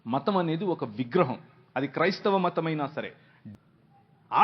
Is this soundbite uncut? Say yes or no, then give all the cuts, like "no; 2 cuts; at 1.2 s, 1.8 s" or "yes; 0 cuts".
no; 1 cut; at 3.3 s